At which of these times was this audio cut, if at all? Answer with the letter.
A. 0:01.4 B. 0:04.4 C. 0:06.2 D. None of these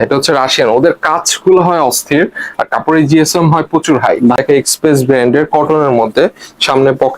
B